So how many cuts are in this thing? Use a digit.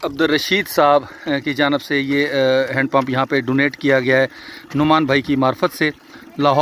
0